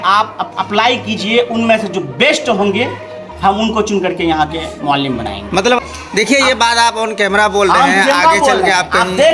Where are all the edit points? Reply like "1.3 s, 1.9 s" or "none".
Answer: 5.8 s